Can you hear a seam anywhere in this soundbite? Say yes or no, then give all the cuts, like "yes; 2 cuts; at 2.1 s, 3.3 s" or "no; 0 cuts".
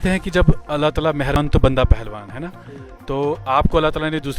yes; 1 cut; at 1.4 s